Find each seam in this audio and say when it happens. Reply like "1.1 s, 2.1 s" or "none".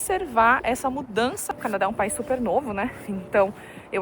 1.5 s